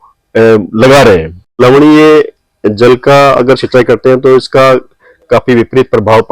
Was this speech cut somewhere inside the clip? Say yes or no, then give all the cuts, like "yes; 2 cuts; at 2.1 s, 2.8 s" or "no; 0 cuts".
yes; 1 cut; at 1.5 s